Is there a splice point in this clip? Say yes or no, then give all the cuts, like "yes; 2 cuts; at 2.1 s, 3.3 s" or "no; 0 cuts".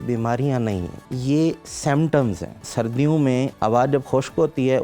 yes; 2 cuts; at 1.0 s, 3.1 s